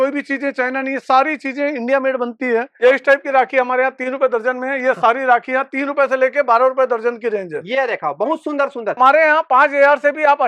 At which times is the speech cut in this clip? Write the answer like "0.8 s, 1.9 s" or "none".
2.8 s, 9.0 s